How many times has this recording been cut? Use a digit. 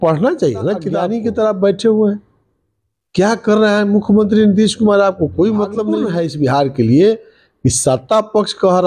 2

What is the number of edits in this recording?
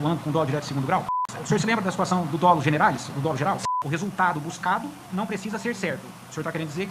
2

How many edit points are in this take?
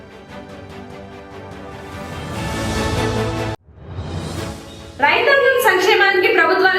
2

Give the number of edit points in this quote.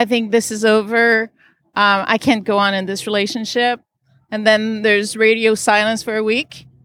0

